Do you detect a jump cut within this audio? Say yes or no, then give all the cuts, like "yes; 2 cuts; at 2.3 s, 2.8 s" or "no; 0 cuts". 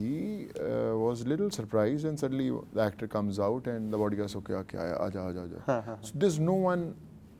no; 0 cuts